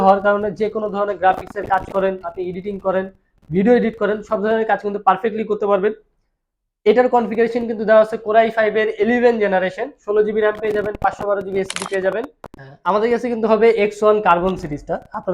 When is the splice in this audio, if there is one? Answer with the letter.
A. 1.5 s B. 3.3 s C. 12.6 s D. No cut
C